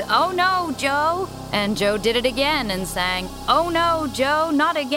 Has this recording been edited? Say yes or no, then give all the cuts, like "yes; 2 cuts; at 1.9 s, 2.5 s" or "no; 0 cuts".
yes; 2 cuts; at 1.4 s, 3.3 s